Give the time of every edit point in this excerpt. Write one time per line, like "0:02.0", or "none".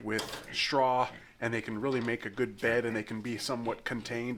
none